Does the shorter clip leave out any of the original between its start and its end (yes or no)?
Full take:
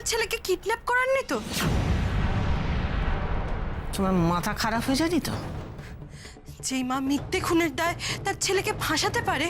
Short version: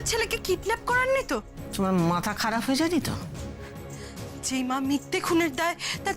yes